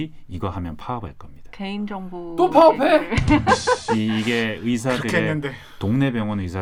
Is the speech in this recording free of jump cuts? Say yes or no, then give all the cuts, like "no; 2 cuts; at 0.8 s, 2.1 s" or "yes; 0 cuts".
yes; 0 cuts